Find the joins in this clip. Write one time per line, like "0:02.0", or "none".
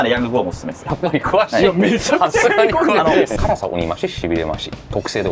0:00.9
0:03.3

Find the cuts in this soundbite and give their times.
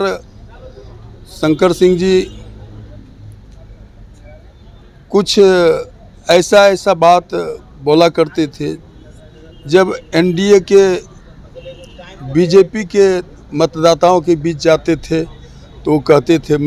none

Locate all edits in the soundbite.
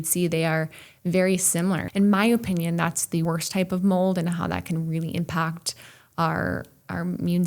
0:01.9
0:03.2

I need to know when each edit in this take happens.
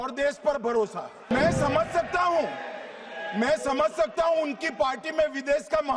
0:01.3

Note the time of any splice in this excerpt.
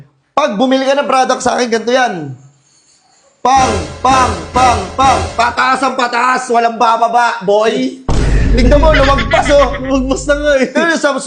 none

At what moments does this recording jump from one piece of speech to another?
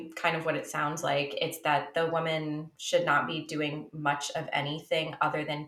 none

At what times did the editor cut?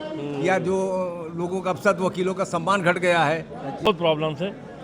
0:03.9

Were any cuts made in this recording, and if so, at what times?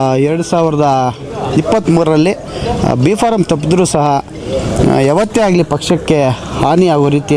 none

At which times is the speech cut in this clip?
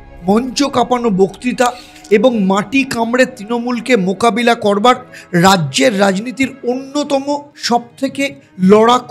0:07.9

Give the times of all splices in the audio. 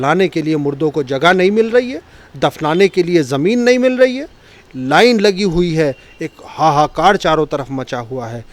none

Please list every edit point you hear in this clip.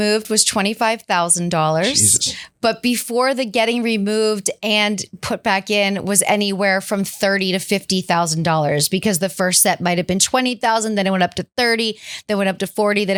none

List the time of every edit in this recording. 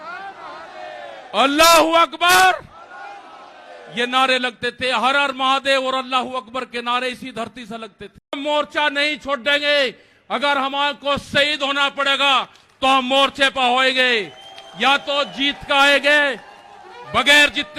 0:08.2

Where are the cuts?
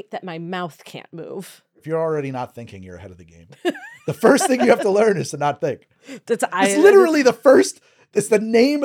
0:01.7

